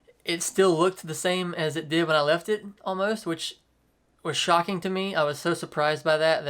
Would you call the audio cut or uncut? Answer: uncut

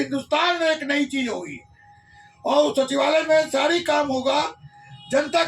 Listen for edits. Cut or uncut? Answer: uncut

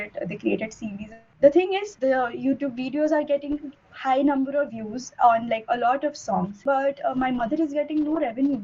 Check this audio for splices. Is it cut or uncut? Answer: cut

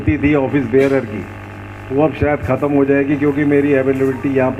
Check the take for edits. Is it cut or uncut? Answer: uncut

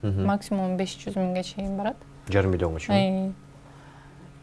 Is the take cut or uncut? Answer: uncut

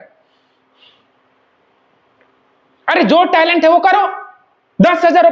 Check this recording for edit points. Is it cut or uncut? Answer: uncut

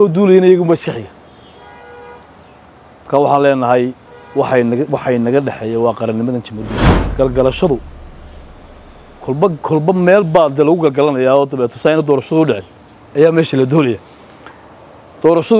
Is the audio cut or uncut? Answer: cut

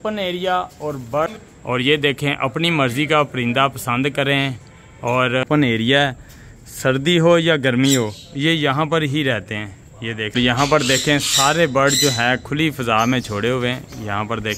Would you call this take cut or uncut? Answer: cut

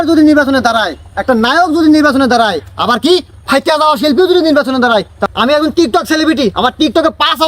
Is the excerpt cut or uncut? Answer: cut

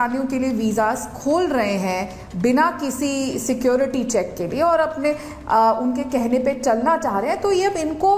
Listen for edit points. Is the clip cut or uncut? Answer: uncut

